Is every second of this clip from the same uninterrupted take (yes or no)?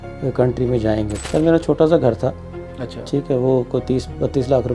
no